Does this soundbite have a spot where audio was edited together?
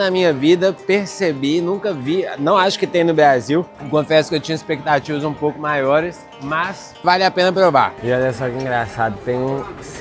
yes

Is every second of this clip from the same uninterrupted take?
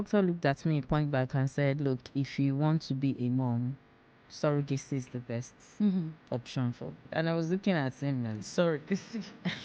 yes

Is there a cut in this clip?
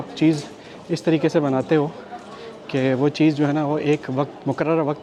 no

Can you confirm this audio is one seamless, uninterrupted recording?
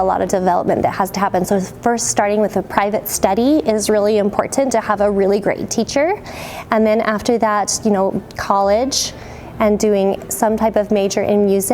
yes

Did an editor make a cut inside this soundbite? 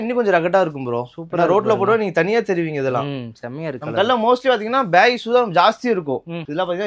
no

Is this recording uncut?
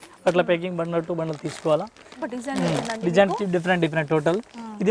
no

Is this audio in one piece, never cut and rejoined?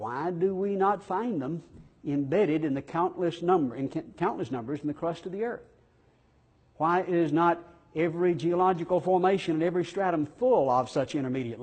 no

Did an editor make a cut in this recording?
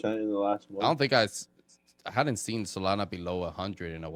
no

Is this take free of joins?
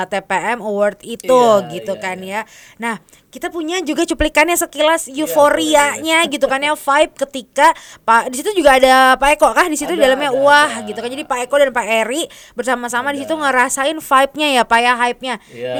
yes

